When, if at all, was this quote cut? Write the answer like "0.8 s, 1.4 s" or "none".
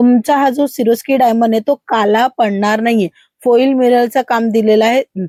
none